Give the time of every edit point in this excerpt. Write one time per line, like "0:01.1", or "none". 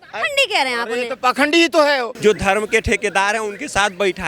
0:02.1